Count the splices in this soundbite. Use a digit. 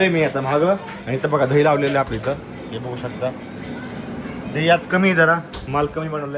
0